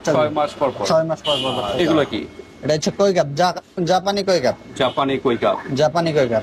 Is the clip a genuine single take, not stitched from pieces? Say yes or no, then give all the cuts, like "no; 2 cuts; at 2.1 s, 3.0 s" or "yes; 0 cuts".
no; 1 cut; at 1.9 s